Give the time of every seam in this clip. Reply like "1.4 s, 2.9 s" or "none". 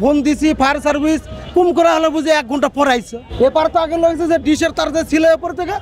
3.2 s

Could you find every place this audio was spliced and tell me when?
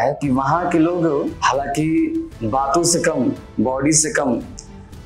1.3 s

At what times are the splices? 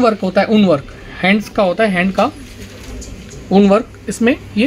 none

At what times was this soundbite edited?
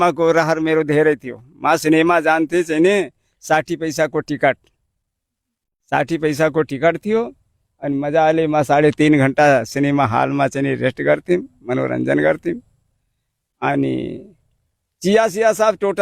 none

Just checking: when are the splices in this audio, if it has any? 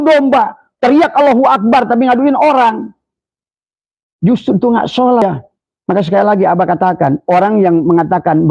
5.2 s

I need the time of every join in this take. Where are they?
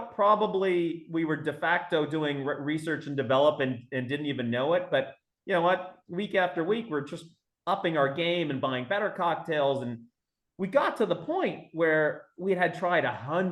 none

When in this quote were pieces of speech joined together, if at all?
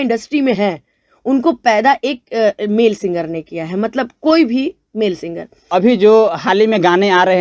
5.6 s

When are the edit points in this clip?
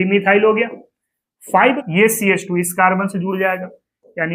1.8 s

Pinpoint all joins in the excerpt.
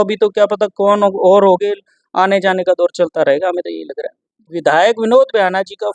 4.5 s

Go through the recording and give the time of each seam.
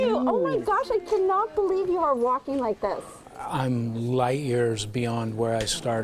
3.2 s

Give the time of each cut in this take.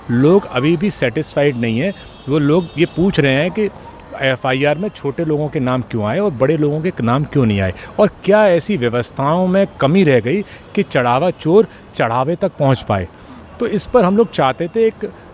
none

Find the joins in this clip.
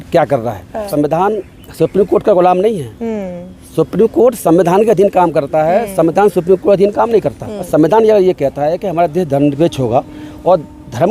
0.9 s, 7.5 s

